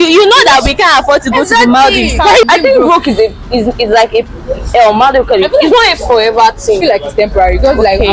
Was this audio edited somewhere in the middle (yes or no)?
yes